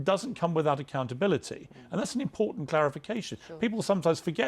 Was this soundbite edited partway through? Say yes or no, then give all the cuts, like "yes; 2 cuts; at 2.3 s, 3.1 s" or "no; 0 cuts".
no; 0 cuts